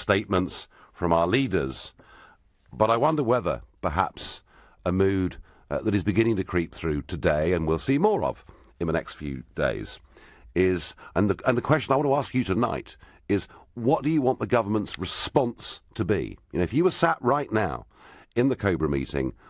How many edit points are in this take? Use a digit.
0